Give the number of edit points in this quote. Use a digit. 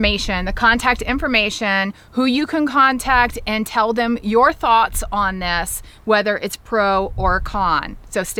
0